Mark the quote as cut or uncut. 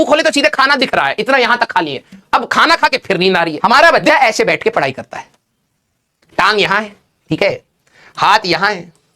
cut